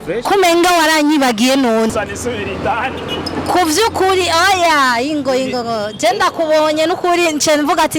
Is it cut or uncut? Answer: cut